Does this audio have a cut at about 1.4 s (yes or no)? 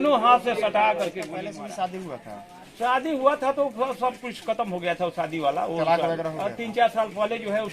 yes